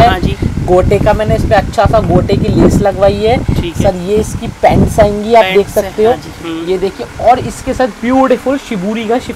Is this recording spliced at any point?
no; 0 cuts

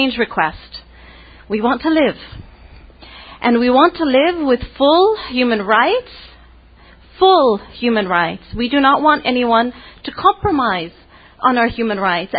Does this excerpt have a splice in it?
no; 0 cuts

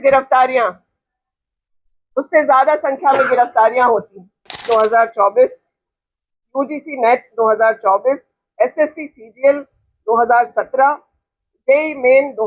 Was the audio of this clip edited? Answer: yes; 1 cut; at 4.6 s

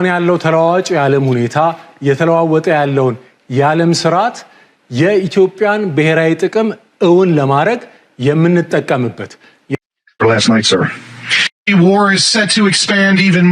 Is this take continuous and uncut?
no; 1 cut; at 10.2 s

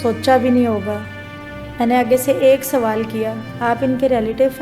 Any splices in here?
yes; 1 cut; at 3.4 s

